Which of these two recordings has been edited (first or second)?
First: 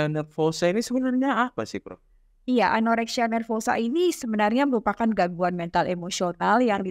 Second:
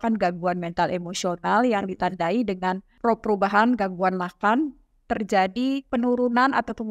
second